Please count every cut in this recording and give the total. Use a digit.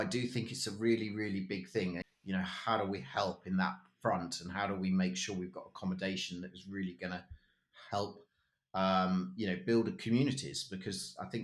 1